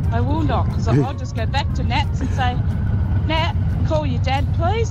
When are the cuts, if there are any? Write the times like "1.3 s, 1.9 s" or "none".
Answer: none